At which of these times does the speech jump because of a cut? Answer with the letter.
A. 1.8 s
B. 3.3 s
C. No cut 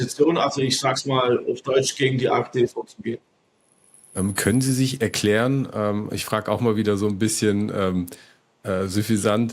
C